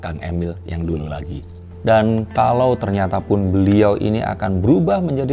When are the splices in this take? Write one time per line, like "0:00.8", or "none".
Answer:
none